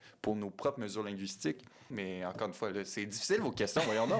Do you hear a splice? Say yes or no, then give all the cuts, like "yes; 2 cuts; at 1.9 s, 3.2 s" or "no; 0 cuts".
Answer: yes; 1 cut; at 1.9 s